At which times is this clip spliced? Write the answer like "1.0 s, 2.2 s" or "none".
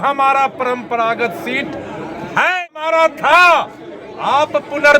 2.6 s